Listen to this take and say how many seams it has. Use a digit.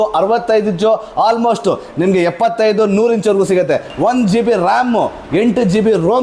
1